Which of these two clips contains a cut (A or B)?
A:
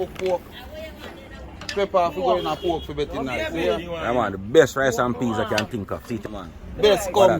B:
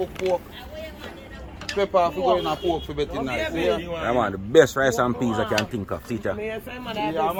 A